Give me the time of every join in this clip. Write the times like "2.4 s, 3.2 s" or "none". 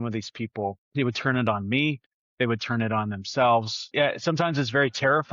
0.8 s, 3.8 s